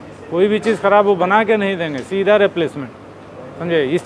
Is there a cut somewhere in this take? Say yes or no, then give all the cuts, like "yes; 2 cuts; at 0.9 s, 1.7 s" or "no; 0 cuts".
no; 0 cuts